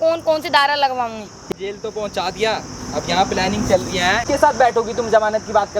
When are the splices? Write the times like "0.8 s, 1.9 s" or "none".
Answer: 1.5 s, 4.2 s